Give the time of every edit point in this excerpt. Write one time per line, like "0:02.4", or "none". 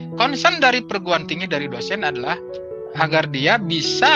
0:02.5